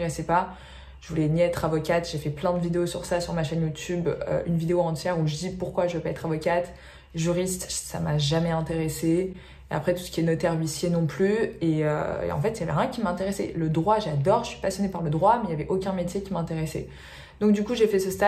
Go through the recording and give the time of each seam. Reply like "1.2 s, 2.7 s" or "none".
none